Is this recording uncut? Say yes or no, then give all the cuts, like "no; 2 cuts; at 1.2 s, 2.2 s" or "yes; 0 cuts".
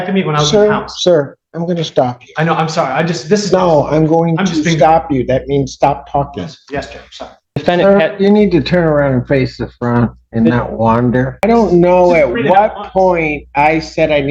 no; 2 cuts; at 7.5 s, 11.4 s